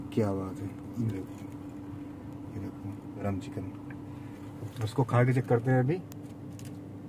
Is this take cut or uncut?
cut